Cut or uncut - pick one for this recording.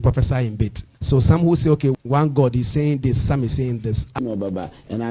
cut